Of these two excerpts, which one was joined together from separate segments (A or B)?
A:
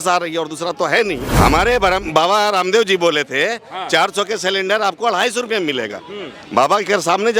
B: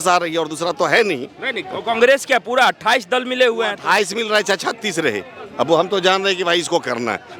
A